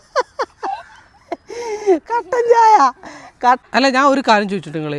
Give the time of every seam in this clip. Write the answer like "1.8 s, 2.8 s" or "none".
3.6 s

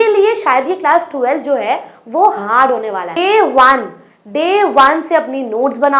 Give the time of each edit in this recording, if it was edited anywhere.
3.2 s

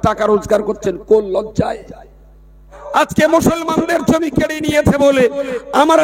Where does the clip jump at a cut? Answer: 2.8 s

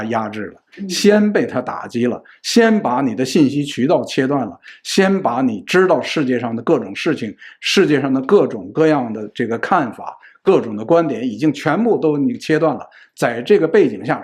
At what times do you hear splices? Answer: none

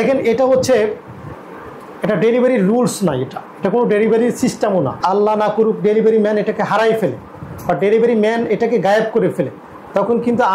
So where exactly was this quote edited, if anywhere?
4.9 s

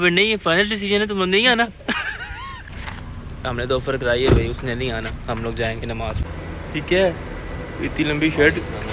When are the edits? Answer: 3.0 s, 6.2 s

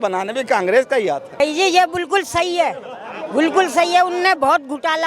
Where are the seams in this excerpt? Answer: 1.4 s

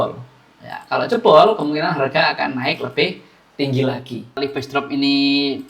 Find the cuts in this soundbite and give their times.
4.5 s

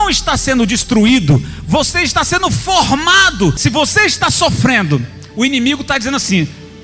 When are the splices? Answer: 3.6 s

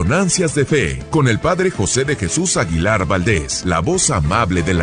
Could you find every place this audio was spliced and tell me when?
1.0 s, 3.5 s

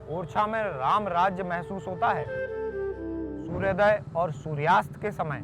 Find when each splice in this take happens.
2.9 s

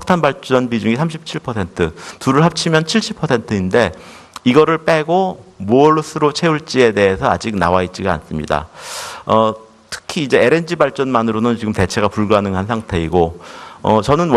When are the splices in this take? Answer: none

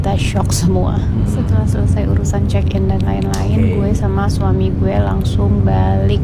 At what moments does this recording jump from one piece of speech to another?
none

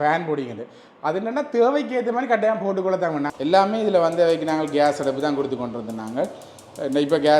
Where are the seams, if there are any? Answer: 3.3 s

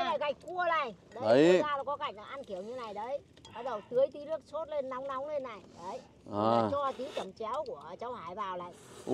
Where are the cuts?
none

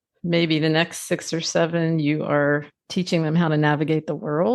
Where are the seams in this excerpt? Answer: 2.8 s

